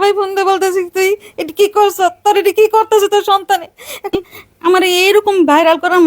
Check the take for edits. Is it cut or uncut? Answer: cut